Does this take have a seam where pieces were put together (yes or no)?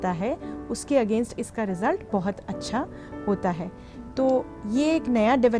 no